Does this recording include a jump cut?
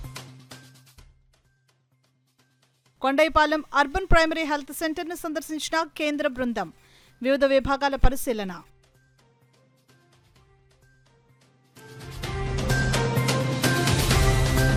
no; 0 cuts

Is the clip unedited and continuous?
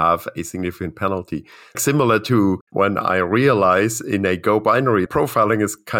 no; 3 cuts; at 1.8 s, 2.6 s, 5.1 s

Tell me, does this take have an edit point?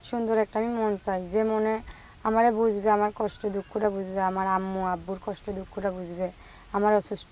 no; 0 cuts

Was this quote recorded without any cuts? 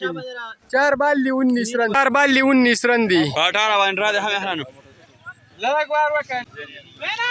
no; 2 cuts; at 2.1 s, 6.3 s

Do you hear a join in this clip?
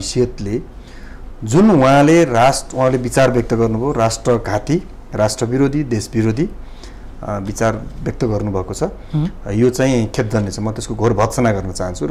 no; 0 cuts

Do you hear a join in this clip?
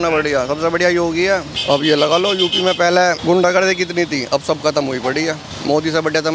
yes; 3 cuts; at 1.5 s, 3.2 s, 5.5 s

